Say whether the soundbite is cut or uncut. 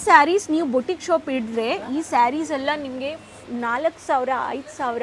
uncut